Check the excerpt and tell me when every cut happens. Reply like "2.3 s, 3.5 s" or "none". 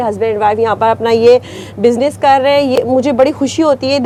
none